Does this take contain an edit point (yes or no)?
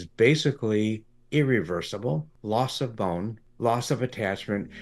yes